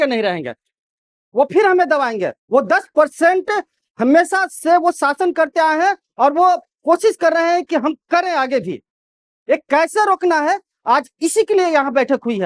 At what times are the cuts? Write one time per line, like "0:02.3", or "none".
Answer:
none